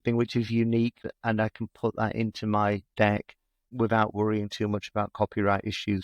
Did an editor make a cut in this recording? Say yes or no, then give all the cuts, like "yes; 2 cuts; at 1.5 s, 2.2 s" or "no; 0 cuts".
yes; 2 cuts; at 1.0 s, 3.1 s